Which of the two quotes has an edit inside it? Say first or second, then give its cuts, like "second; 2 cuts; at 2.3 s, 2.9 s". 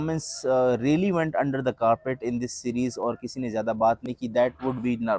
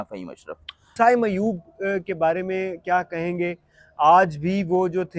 second; 1 cut; at 0.9 s